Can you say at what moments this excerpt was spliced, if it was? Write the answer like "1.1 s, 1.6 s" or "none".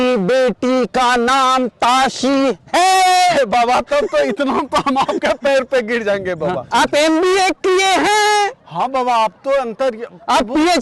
6.6 s